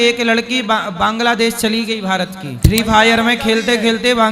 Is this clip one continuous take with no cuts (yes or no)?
no